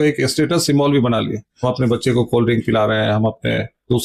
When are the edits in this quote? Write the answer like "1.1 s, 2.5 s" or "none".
none